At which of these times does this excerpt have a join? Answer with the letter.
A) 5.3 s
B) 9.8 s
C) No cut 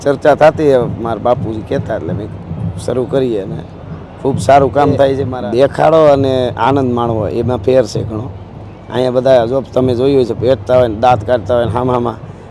A